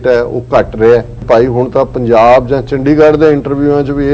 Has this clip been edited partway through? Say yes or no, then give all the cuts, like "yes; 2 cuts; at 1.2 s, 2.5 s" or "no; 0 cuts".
yes; 1 cut; at 1.1 s